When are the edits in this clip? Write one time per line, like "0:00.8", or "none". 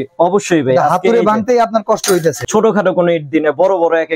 0:02.4

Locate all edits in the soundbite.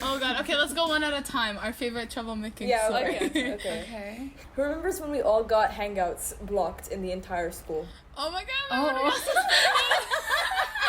0:04.4

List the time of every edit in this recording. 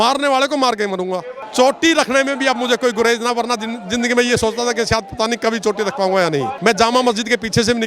0:01.4
0:06.5

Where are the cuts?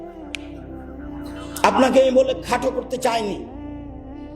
0:01.1

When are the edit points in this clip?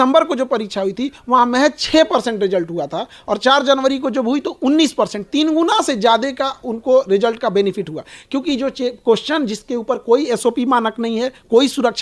none

